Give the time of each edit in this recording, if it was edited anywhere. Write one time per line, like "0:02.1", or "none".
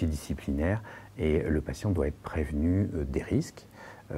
none